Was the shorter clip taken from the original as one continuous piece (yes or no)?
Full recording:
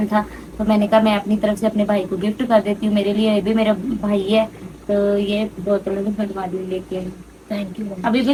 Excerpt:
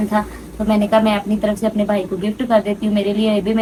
yes